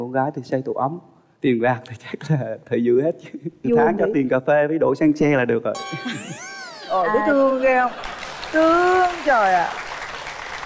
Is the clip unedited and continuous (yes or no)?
yes